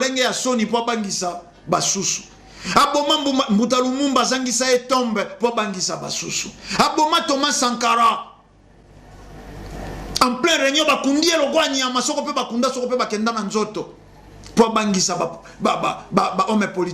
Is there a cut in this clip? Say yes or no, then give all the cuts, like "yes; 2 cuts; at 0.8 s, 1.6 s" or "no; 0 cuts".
no; 0 cuts